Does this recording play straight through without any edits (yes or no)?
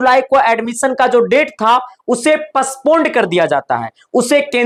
yes